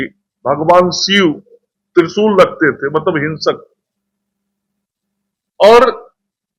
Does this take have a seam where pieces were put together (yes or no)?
no